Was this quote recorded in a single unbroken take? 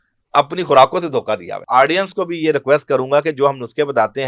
no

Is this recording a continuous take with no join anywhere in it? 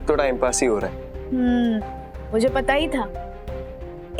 yes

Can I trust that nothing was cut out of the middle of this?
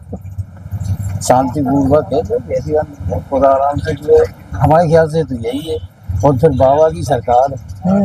yes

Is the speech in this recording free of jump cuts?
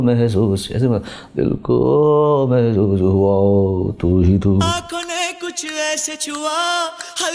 no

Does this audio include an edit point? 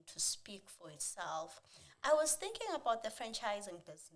no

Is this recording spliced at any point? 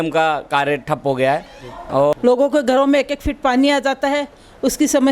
yes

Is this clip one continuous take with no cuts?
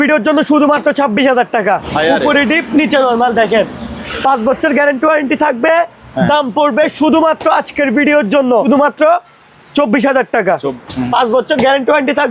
no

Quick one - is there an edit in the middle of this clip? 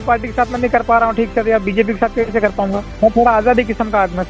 no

